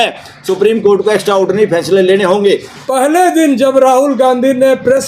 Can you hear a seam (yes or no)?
yes